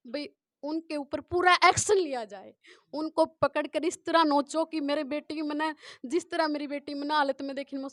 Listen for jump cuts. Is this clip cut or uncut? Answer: uncut